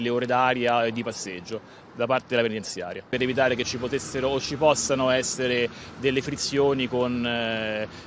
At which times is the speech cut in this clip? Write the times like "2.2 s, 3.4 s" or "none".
none